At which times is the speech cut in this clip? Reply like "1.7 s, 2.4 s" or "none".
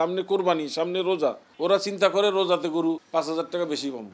1.5 s, 3.0 s